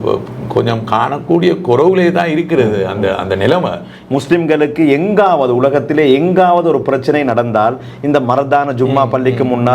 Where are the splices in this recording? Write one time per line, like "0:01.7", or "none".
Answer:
0:03.9